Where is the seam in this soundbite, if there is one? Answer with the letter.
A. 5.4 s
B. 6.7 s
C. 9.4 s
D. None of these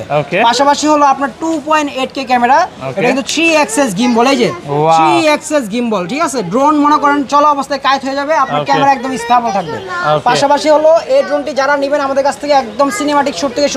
D